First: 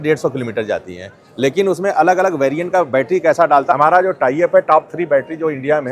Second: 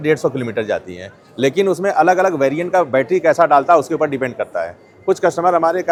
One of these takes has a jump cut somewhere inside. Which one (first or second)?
first